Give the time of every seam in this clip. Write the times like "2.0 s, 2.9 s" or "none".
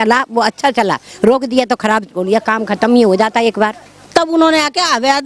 4.0 s